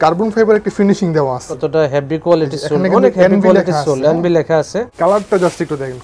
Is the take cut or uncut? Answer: cut